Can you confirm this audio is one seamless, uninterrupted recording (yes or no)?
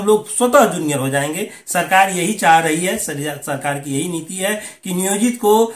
yes